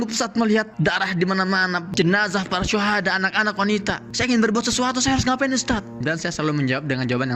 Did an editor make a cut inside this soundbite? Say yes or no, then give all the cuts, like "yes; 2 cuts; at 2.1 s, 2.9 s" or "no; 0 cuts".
yes; 1 cut; at 6.0 s